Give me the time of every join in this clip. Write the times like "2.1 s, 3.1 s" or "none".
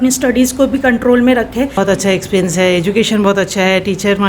1.7 s